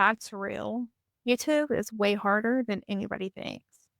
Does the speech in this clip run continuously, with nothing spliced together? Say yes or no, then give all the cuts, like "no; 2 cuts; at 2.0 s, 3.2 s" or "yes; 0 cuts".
no; 1 cut; at 1.0 s